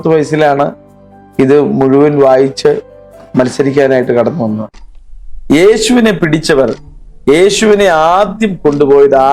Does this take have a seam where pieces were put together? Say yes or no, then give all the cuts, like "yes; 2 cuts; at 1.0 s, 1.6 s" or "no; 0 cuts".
yes; 1 cut; at 4.8 s